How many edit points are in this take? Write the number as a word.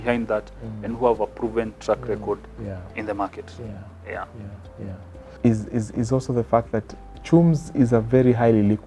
one